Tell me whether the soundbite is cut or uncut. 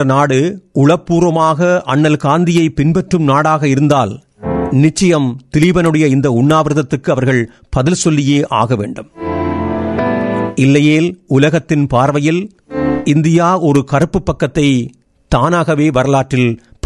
uncut